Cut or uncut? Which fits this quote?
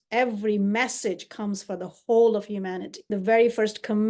cut